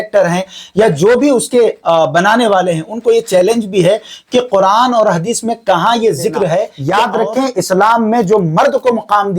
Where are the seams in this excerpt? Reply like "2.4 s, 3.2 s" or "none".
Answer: 6.8 s